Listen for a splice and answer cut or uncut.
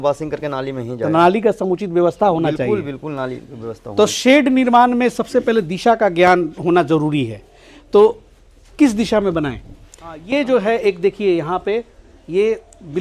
cut